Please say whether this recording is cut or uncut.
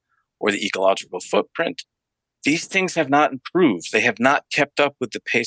uncut